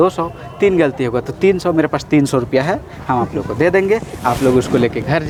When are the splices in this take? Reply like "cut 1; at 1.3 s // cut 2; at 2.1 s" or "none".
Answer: none